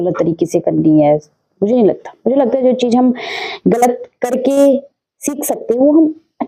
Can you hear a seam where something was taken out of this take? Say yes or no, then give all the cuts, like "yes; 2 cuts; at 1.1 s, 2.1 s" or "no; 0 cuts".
no; 0 cuts